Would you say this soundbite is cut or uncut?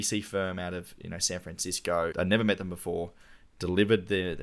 cut